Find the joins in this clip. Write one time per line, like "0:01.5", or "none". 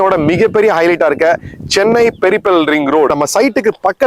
0:03.1

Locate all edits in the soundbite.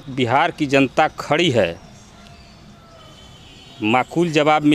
none

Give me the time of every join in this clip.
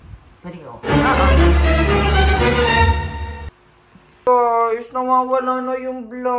0:04.2

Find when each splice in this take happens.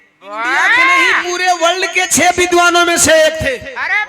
0:01.2

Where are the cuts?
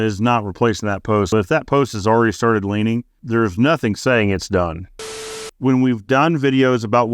0:01.3
0:05.3

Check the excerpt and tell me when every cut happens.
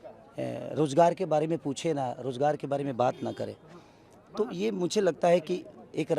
none

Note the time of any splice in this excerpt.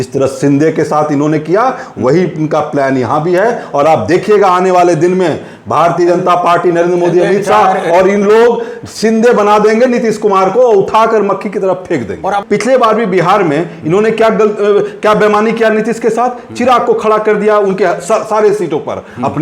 0:12.4

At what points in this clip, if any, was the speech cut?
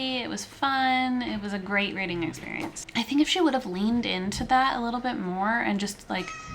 0:02.9

